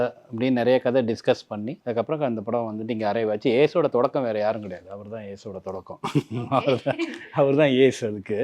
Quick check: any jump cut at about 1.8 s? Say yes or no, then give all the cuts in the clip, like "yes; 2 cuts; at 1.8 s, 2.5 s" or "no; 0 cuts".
yes; 1 cut; at 1.8 s